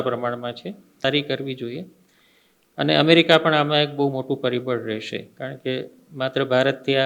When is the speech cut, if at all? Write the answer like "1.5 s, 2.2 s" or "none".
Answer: 1.0 s